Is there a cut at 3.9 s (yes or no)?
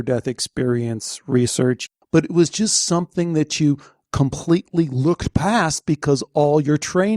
no